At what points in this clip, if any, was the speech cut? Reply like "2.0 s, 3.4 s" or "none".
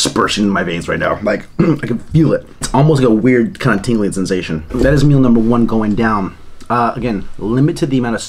none